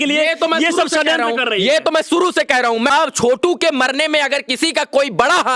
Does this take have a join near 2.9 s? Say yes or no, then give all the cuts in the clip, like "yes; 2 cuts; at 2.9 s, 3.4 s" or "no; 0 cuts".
yes; 1 cut; at 2.9 s